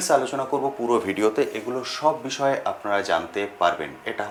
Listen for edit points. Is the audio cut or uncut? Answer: uncut